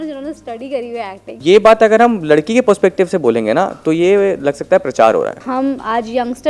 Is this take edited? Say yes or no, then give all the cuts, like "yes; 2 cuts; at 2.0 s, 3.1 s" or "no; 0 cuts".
yes; 2 cuts; at 1.2 s, 5.4 s